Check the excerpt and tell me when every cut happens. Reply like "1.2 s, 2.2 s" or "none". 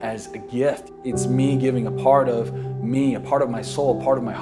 0.9 s